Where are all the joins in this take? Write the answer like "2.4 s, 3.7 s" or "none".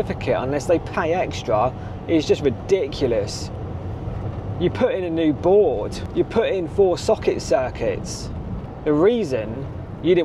none